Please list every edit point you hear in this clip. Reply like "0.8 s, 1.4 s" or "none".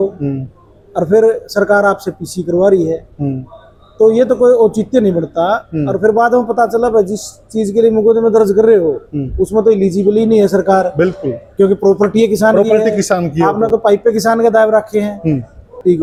none